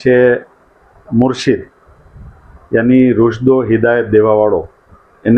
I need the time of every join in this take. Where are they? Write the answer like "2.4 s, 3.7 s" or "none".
none